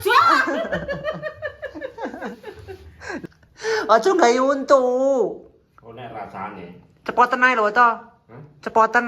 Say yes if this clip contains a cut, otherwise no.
yes